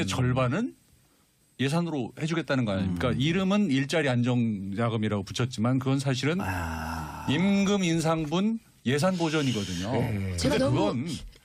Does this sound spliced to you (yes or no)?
no